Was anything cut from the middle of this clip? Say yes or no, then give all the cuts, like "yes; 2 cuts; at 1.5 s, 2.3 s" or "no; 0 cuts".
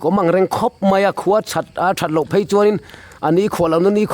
no; 0 cuts